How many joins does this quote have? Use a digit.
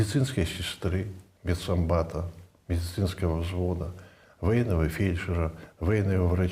0